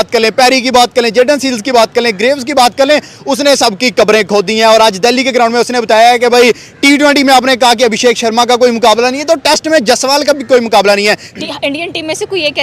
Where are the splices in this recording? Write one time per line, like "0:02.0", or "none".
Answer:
0:11.3